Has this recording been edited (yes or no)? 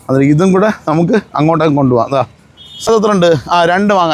yes